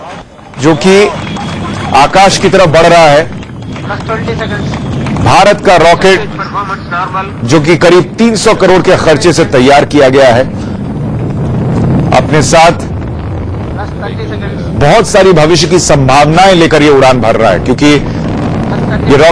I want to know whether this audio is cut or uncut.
uncut